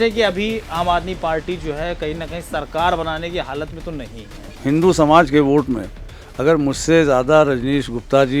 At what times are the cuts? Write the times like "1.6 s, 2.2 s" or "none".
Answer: 4.5 s